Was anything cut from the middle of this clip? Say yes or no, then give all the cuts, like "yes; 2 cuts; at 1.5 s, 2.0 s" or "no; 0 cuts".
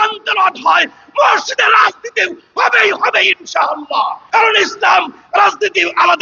yes; 1 cut; at 4.2 s